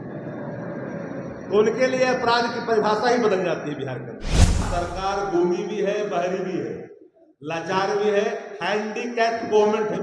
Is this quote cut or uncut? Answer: cut